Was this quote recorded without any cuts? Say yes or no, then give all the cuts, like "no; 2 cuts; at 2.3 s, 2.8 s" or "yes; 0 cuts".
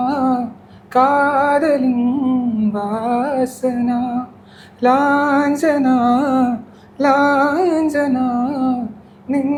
yes; 0 cuts